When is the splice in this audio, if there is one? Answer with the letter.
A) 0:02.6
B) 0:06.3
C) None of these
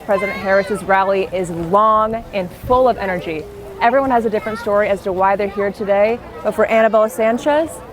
C